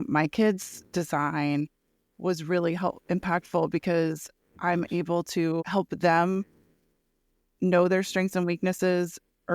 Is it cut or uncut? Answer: cut